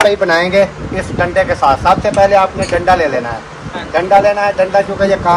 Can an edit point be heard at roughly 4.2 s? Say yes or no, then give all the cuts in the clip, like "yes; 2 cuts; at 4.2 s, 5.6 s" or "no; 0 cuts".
no; 0 cuts